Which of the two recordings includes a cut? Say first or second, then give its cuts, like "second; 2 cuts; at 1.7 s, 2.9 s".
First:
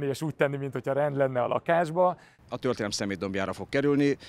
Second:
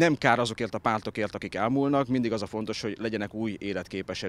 first; 1 cut; at 2.3 s